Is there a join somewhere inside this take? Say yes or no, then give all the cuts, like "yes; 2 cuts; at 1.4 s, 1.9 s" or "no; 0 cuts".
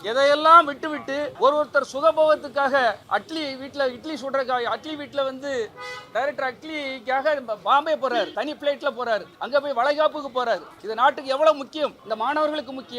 yes; 6 cuts; at 1.3 s, 3.0 s, 8.3 s, 9.3 s, 10.8 s, 12.0 s